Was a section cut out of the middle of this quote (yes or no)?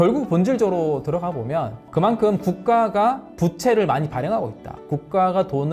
no